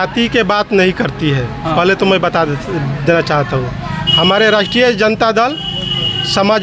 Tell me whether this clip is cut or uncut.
uncut